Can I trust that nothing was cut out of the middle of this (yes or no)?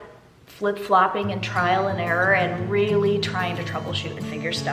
yes